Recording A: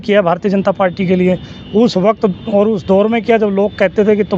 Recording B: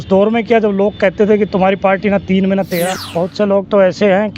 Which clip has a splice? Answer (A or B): B